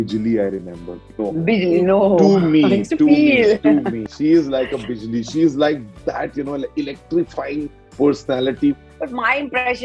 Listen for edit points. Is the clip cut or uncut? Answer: cut